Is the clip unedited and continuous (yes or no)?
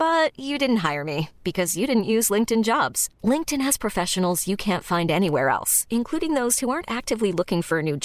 yes